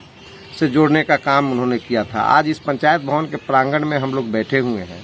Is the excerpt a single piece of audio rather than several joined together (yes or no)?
yes